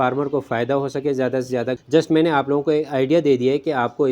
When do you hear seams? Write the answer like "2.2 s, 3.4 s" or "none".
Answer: 1.8 s